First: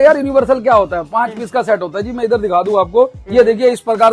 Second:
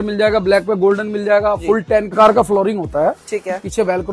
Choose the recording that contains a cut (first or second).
second